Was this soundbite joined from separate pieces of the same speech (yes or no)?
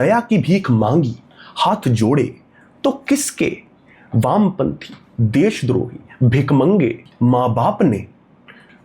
yes